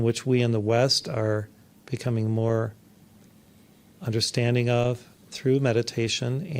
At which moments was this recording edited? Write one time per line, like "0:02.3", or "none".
none